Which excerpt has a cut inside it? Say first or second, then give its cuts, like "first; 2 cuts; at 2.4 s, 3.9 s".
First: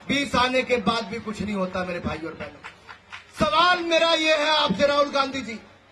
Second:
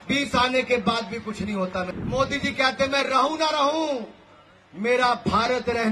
second; 1 cut; at 1.9 s